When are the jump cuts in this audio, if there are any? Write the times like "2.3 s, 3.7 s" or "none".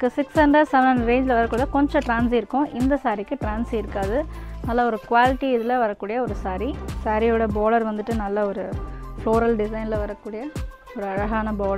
6.9 s